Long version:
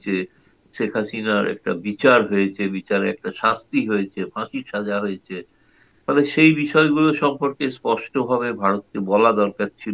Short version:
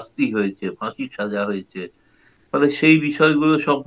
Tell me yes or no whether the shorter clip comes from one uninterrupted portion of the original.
yes